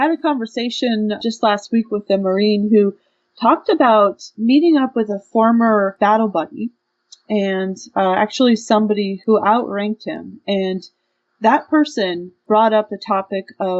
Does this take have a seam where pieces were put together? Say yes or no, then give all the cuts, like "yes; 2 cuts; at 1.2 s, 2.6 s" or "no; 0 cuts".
yes; 5 cuts; at 1.2 s, 4.3 s, 5.9 s, 9.1 s, 12.4 s